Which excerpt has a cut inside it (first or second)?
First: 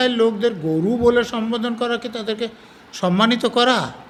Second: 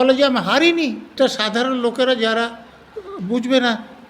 second